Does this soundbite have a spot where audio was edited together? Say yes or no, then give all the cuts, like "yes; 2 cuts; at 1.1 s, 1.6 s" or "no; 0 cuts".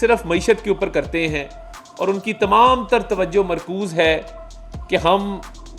no; 0 cuts